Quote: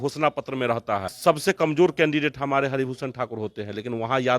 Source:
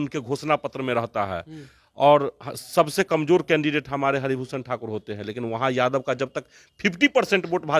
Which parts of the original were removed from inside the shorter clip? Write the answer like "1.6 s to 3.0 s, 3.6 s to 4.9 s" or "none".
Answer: 1.4 s to 2.6 s